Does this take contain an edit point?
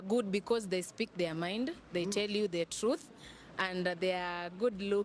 no; 0 cuts

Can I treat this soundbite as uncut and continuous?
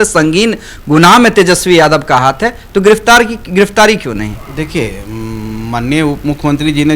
yes; 0 cuts

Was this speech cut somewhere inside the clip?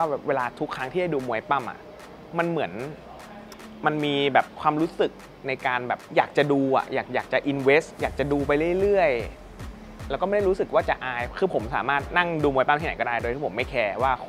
yes; 2 cuts; at 4.5 s, 7.9 s

